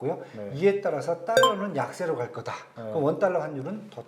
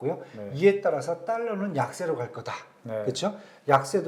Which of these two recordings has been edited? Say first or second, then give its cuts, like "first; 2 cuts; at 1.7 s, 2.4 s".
first; 1 cut; at 2.7 s